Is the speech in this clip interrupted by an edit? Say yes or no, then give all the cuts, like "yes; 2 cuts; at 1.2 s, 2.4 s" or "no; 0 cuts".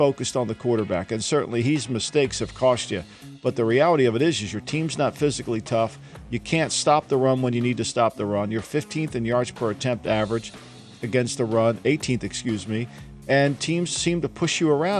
no; 0 cuts